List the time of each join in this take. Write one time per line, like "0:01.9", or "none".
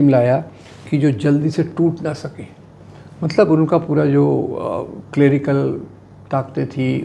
none